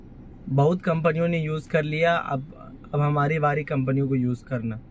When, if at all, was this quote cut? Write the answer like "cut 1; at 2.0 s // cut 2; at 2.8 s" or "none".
none